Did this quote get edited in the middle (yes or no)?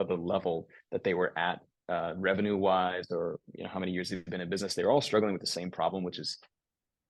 no